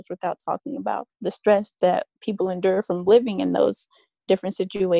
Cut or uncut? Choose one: cut